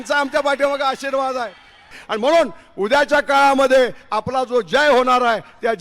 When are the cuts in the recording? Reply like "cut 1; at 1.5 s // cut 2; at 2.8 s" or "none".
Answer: cut 1; at 1.9 s